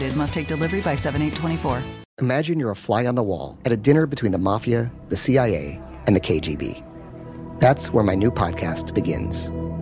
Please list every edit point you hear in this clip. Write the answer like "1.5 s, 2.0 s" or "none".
2.0 s